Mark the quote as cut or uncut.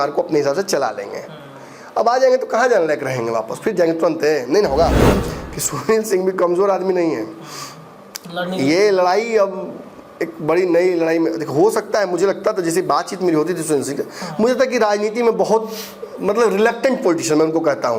cut